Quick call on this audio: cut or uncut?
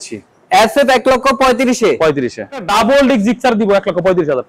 cut